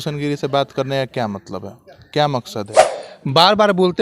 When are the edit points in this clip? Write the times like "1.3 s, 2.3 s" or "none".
2.8 s